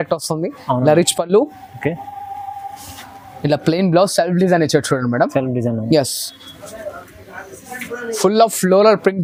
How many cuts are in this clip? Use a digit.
0